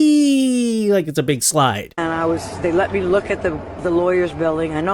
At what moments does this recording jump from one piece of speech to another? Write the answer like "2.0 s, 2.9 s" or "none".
1.9 s